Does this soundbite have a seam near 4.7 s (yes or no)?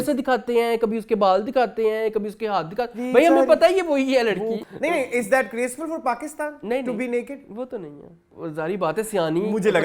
yes